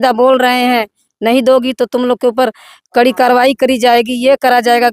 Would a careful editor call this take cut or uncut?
uncut